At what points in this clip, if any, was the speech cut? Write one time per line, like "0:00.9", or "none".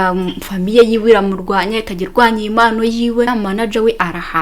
0:03.3